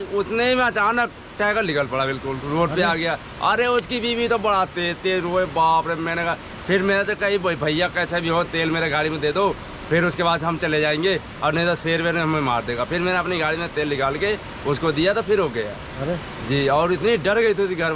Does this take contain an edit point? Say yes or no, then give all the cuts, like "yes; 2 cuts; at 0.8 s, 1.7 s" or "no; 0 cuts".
no; 0 cuts